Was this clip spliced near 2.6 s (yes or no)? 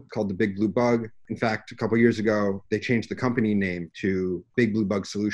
yes